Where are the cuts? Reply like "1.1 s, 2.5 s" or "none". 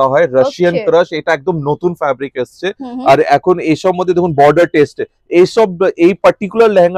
none